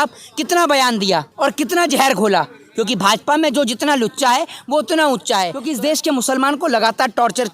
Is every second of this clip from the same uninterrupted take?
no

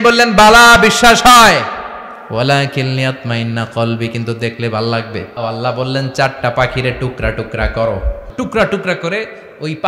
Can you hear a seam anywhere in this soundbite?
yes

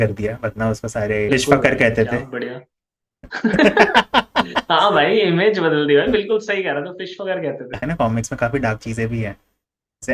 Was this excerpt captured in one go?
no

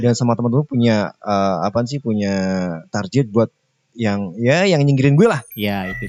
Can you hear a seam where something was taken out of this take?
no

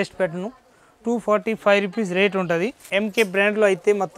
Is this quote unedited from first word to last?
no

